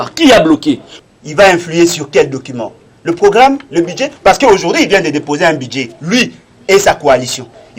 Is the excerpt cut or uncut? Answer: cut